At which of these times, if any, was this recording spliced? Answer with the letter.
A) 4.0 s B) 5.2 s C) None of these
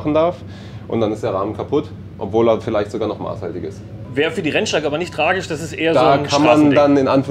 A